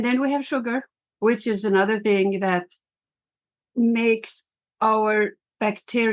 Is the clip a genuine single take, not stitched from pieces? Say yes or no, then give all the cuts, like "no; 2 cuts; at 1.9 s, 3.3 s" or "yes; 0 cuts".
no; 1 cut; at 1.0 s